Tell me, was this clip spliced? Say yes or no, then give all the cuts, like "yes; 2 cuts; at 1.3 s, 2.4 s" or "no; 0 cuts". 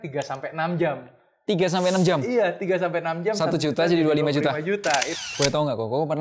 yes; 1 cut; at 5.1 s